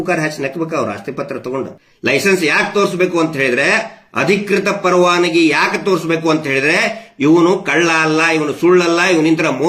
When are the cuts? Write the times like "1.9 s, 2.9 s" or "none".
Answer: 1.8 s